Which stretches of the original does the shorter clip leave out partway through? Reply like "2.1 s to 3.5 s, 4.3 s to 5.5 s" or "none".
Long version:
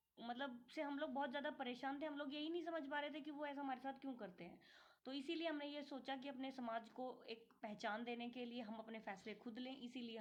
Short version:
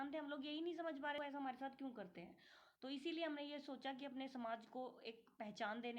3.1 s to 3.4 s